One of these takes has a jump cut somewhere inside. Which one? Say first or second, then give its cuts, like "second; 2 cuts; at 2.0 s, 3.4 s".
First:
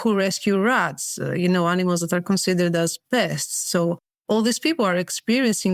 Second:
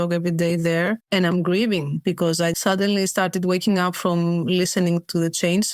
second; 2 cuts; at 1.0 s, 2.2 s